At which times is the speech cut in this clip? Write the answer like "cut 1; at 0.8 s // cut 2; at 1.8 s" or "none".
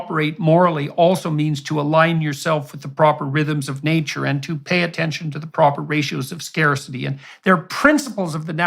cut 1; at 7.3 s